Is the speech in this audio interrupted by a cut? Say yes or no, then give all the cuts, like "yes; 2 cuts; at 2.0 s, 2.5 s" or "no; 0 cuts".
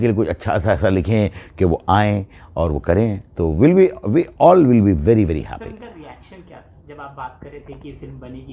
no; 0 cuts